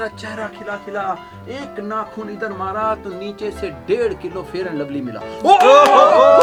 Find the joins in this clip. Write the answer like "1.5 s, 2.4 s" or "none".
none